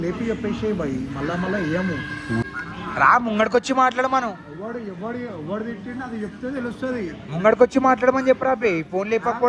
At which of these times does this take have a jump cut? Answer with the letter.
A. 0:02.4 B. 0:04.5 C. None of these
A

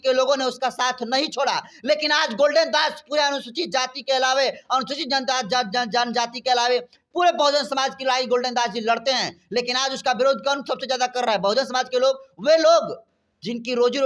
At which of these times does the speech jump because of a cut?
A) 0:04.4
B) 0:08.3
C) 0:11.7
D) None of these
D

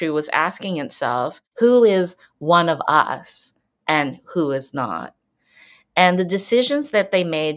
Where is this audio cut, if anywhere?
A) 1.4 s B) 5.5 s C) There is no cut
A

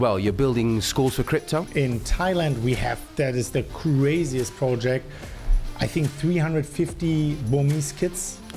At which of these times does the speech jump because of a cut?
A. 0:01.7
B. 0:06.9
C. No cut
A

